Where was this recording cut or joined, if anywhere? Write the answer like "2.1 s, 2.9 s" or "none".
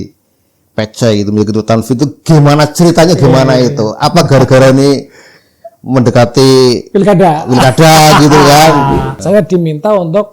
9.1 s